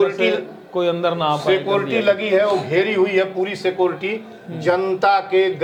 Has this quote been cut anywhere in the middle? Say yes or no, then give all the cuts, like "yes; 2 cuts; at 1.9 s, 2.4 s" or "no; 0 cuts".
no; 0 cuts